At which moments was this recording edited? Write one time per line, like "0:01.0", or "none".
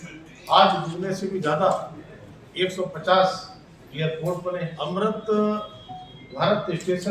0:04.8